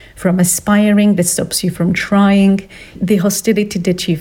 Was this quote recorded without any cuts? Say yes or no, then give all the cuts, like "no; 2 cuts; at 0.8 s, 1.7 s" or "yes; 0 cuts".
no; 1 cut; at 2.9 s